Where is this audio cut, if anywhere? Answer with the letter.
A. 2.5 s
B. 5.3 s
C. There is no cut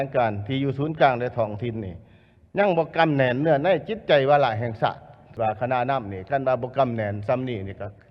B